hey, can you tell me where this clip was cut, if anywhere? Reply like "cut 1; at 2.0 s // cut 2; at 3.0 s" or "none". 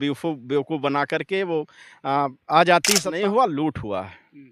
cut 1; at 3.1 s